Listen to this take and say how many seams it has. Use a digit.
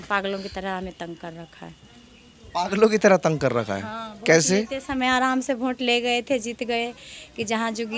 0